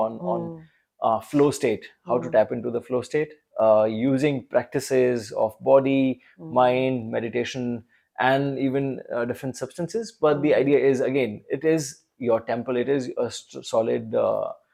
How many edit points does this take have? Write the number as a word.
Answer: zero